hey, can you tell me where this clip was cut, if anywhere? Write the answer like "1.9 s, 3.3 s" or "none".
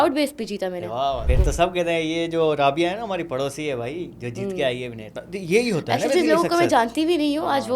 1.3 s